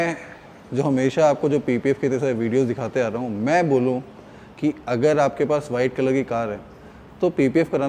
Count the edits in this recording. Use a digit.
0